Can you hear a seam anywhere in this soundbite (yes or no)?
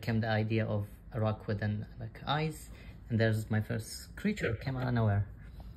no